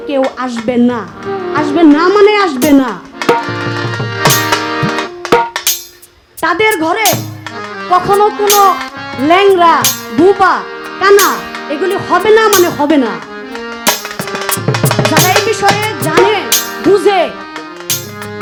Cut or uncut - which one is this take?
uncut